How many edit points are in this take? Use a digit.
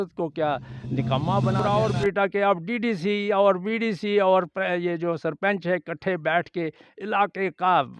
1